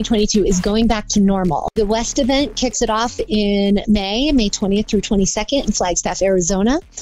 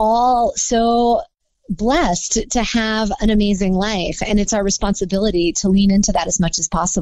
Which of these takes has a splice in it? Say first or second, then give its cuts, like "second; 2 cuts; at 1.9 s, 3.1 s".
first; 1 cut; at 1.8 s